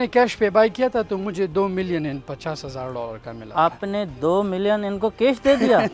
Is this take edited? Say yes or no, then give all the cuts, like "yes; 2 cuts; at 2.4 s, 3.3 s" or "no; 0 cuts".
no; 0 cuts